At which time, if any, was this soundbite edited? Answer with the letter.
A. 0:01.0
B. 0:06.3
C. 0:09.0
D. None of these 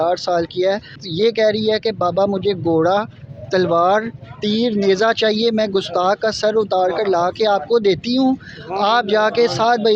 A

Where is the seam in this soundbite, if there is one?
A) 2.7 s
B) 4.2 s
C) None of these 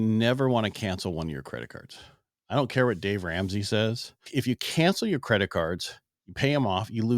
B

